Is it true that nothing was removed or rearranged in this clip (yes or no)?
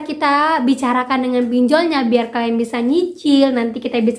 yes